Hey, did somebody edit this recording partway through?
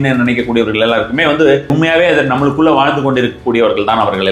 yes; 1 cut; at 1.7 s

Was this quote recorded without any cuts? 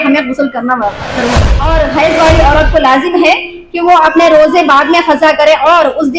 no; 1 cut; at 1.5 s

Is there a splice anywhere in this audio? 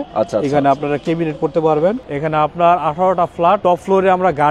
yes; 2 cuts; at 2.1 s, 3.6 s

